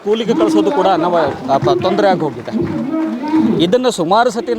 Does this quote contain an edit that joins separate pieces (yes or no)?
no